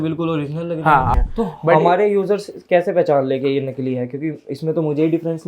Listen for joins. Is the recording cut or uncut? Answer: cut